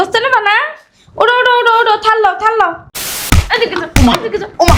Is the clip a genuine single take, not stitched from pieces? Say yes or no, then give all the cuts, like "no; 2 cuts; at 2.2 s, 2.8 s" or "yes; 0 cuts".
no; 1 cut; at 3.2 s